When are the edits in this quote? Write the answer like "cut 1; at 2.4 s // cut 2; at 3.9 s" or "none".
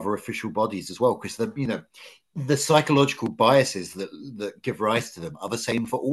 none

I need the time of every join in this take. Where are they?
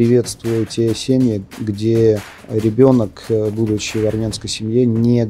cut 1; at 2.3 s

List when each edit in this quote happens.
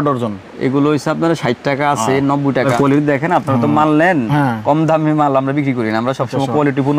cut 1; at 2.7 s

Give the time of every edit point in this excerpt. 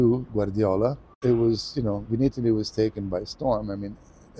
cut 1; at 1.1 s

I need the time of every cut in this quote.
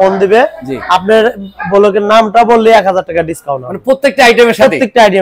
none

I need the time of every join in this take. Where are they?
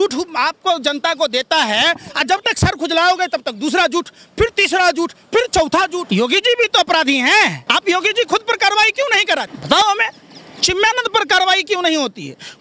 cut 1; at 6.0 s // cut 2; at 7.6 s // cut 3; at 9.6 s

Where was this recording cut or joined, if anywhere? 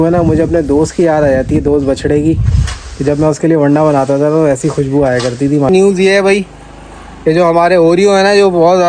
cut 1; at 5.7 s

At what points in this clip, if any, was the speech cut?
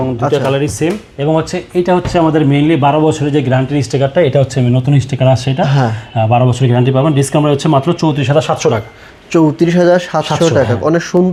none

